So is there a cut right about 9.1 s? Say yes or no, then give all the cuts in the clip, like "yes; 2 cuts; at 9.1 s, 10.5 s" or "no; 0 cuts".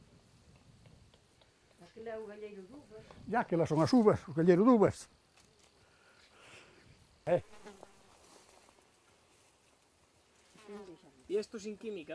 yes; 1 cut; at 9.1 s